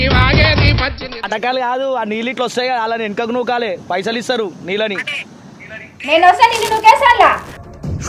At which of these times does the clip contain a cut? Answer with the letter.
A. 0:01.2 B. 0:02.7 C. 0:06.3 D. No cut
A